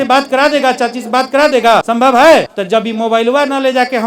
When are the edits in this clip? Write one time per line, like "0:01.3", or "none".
0:01.9
0:02.5